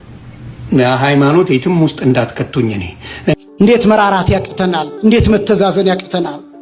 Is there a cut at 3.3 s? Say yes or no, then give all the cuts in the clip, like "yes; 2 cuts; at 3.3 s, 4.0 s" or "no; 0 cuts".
yes; 1 cut; at 3.3 s